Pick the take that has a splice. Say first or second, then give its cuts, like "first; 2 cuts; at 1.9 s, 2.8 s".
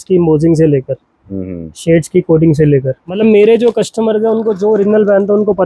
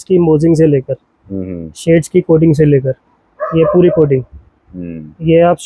first; 1 cut; at 3.2 s